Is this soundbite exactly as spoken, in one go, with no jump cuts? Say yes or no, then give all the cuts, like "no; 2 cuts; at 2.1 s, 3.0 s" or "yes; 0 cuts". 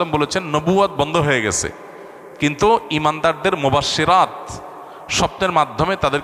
yes; 0 cuts